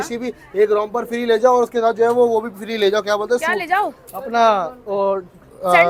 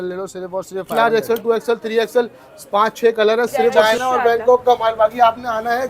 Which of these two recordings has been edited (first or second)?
second